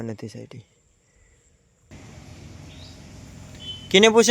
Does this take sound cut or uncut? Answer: cut